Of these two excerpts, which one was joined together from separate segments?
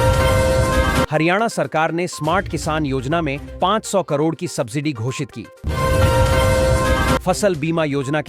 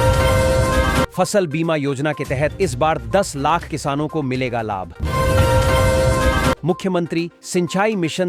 first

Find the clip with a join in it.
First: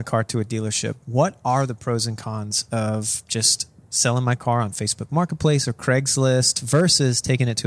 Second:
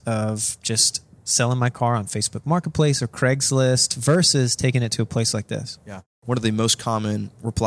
first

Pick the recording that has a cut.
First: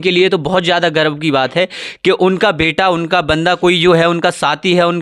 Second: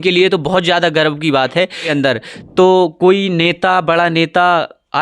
second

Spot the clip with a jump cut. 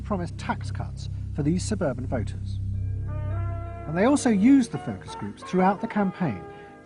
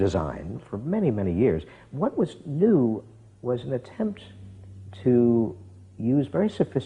second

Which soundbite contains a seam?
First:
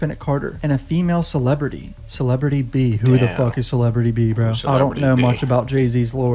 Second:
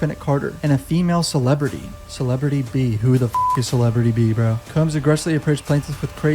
second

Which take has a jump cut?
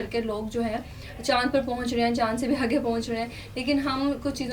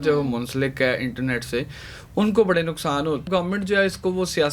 second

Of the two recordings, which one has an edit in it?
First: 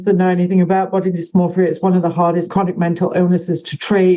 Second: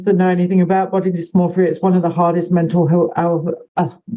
first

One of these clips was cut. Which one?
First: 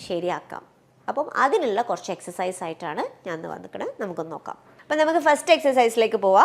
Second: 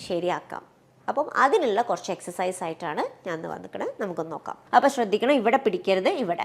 second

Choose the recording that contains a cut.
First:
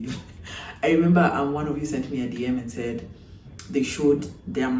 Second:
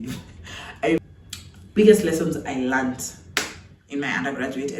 second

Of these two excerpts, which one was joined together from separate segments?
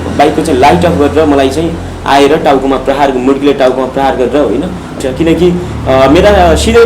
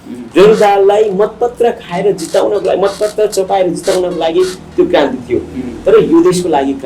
first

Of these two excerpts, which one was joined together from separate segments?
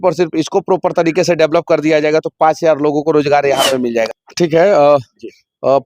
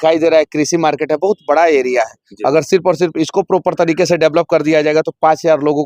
first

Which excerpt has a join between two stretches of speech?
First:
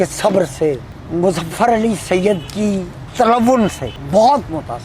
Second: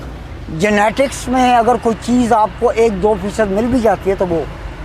first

